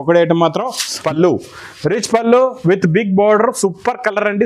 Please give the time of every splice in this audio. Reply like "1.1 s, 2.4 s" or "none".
1.0 s